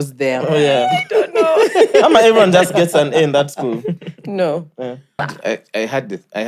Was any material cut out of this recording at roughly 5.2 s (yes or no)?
yes